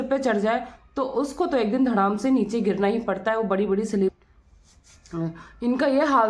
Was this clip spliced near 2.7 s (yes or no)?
no